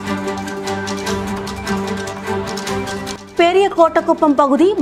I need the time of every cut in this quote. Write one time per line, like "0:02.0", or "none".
none